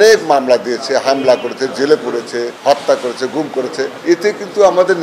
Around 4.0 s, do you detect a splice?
yes; 2 cuts; at 2.5 s, 4.0 s

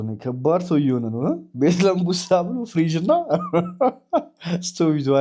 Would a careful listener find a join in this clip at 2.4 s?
no; 0 cuts

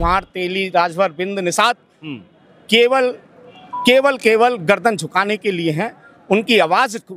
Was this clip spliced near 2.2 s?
no; 0 cuts

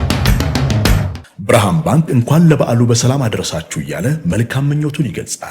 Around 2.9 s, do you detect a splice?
no; 1 cut; at 1.1 s

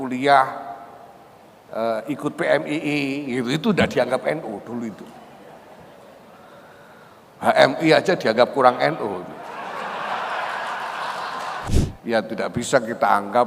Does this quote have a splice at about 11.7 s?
yes; 1 cut; at 11.7 s

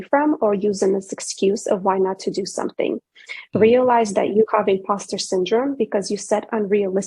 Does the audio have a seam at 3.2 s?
no; 0 cuts

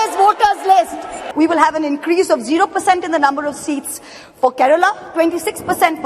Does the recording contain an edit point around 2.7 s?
no; 1 cut; at 1.2 s

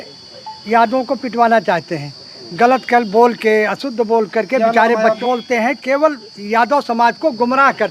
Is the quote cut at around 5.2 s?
yes; 1 cut; at 5.2 s

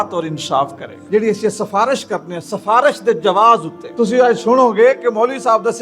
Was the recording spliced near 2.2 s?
no; 2 cuts; at 0.9 s, 3.8 s

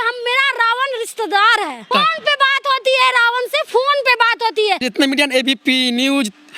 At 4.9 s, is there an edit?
yes; 2 cuts; at 1.9 s, 4.9 s

